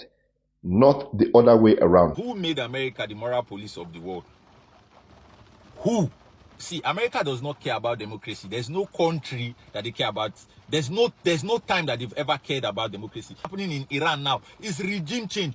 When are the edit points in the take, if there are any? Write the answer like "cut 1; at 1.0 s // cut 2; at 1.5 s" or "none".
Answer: cut 1; at 2.2 s // cut 2; at 6.6 s // cut 3; at 13.5 s